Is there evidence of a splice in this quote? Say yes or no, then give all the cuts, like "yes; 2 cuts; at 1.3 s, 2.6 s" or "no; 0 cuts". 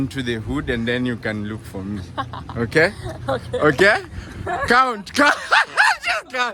no; 0 cuts